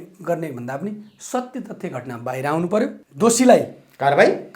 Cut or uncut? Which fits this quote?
cut